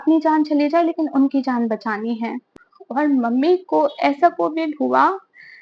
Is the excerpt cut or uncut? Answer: cut